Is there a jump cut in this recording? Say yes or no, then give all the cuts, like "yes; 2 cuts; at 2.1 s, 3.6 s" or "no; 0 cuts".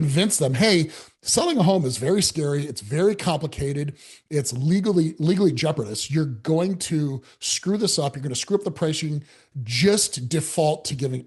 no; 0 cuts